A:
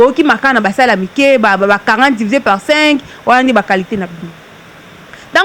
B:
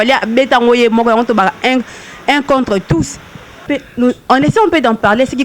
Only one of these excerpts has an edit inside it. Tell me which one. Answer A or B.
B